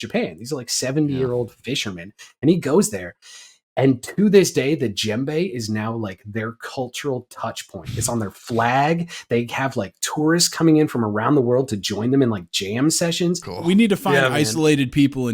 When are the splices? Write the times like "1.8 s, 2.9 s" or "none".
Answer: 13.5 s